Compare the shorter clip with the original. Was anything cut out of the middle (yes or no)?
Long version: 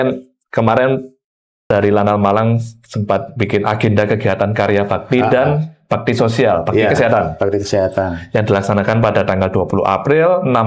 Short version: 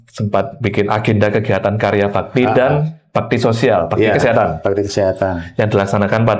no